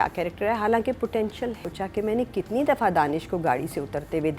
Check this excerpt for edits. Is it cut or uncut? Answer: cut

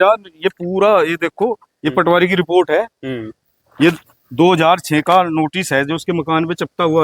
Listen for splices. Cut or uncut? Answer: uncut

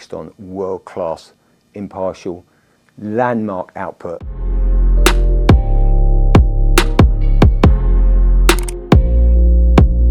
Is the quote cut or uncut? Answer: cut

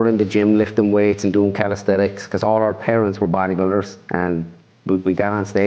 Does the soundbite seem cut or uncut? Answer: cut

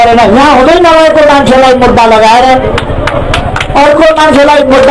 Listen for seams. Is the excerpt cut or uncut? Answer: uncut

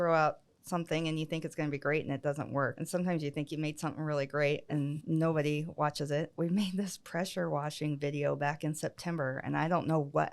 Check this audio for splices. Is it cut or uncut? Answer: cut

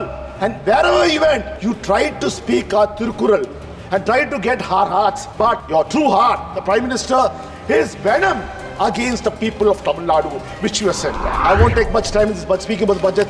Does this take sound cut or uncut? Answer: cut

